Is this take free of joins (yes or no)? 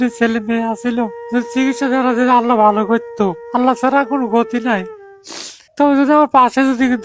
yes